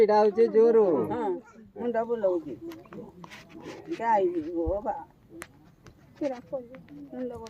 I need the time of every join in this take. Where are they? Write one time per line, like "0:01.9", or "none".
0:01.6